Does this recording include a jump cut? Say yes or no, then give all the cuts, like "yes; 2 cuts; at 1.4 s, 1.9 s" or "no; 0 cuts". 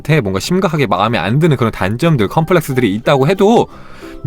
no; 0 cuts